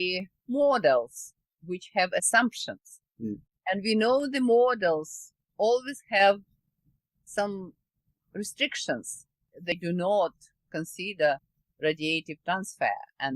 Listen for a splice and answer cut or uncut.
cut